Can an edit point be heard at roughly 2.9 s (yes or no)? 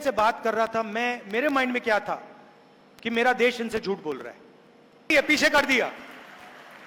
no